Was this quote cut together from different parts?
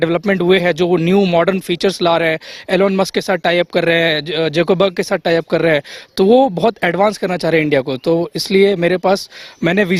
no; 0 cuts

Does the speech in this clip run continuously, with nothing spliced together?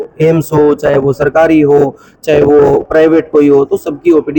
yes; 0 cuts

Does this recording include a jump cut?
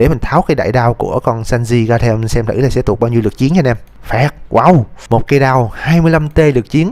yes; 2 cuts; at 3.9 s, 4.9 s

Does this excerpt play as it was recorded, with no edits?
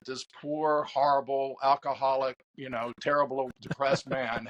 yes; 0 cuts

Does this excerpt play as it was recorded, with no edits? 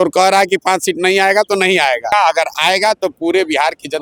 no; 1 cut; at 2.1 s

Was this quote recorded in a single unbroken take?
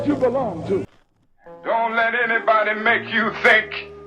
no; 1 cut; at 1.0 s

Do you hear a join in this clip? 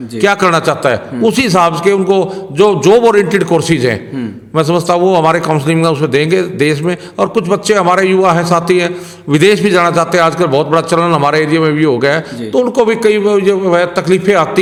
no; 0 cuts

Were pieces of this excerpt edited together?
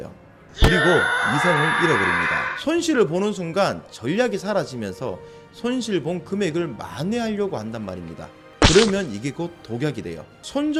no; 0 cuts

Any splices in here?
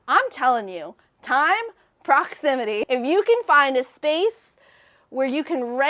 yes; 1 cut; at 2.8 s

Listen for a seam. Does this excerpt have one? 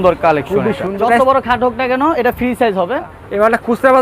yes; 2 cuts; at 0.9 s, 3.0 s

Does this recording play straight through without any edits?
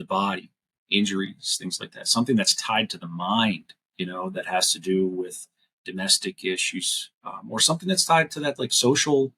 yes; 0 cuts

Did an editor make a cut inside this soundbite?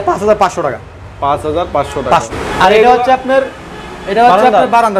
yes; 1 cut; at 2.3 s

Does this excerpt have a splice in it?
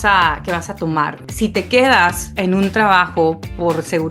yes; 2 cuts; at 1.2 s, 2.3 s

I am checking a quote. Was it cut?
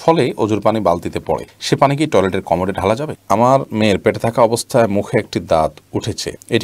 yes; 1 cut; at 3.2 s

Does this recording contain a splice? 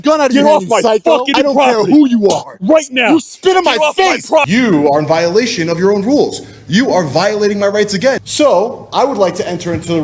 yes; 3 cuts; at 1.3 s, 4.5 s, 8.2 s

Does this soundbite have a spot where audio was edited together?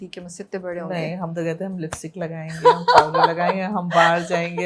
no; 0 cuts

